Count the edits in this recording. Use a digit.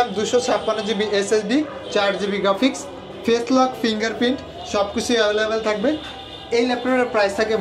0